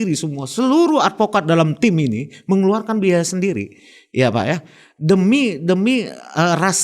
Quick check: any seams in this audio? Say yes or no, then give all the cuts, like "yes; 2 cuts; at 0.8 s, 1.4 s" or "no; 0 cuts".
no; 0 cuts